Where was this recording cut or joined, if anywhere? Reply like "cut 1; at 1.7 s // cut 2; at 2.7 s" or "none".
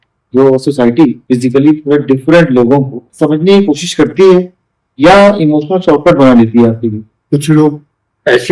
cut 1; at 1.2 s // cut 2; at 3.1 s // cut 3; at 7.1 s

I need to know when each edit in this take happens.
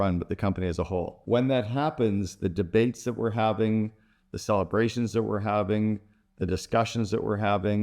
cut 1; at 1.2 s

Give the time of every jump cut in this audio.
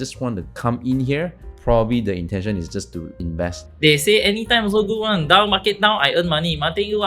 cut 1; at 1.5 s // cut 2; at 3.6 s

